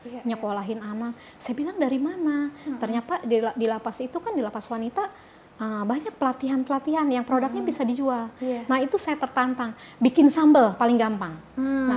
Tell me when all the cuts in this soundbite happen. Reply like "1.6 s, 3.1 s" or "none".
none